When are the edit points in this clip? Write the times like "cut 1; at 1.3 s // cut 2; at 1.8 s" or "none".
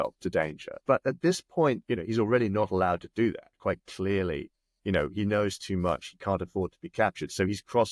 cut 1; at 0.8 s // cut 2; at 1.8 s